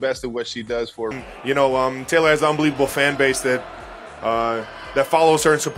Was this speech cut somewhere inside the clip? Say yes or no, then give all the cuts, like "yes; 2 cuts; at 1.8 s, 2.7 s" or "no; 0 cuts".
yes; 1 cut; at 1.1 s